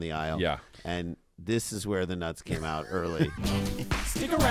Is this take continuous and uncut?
no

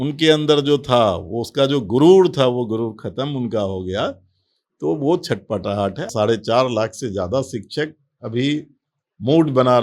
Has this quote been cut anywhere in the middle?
yes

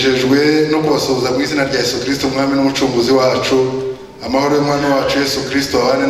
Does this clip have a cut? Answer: no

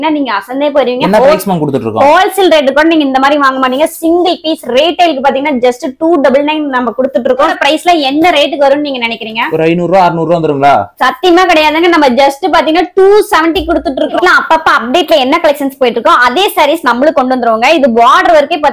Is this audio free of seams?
no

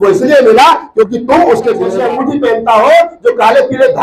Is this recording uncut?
no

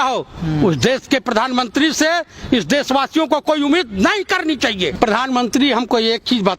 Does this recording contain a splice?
yes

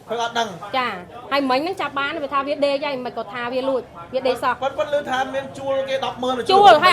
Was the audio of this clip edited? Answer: no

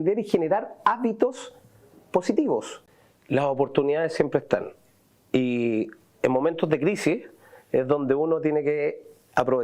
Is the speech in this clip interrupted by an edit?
yes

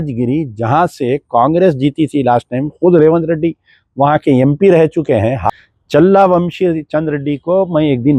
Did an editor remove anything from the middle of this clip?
yes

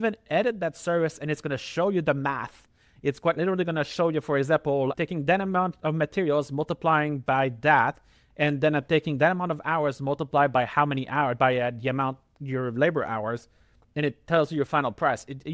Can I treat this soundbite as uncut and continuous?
yes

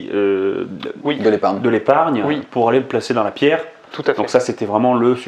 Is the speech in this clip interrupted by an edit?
no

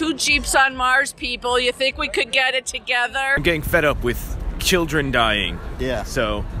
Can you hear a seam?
yes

